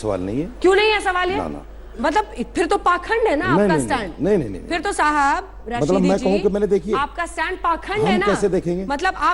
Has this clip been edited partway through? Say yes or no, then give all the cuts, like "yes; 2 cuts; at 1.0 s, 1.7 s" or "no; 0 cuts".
no; 0 cuts